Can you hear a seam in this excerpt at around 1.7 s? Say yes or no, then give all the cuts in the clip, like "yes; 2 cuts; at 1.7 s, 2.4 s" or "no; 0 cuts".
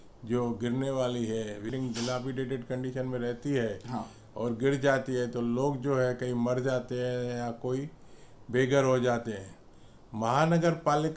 yes; 1 cut; at 1.7 s